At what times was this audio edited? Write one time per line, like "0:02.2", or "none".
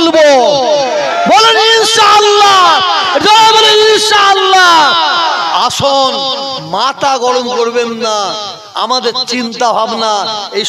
none